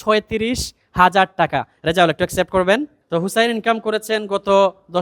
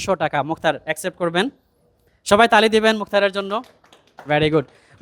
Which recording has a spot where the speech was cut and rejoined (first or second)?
first